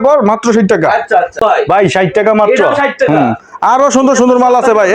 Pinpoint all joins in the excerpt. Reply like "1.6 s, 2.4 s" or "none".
1.4 s